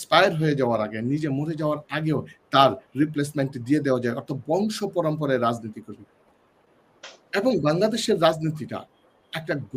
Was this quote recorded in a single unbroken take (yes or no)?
yes